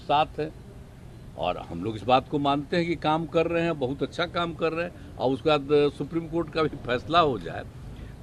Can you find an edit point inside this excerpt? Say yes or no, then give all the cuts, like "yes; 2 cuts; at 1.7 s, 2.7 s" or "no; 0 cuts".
no; 0 cuts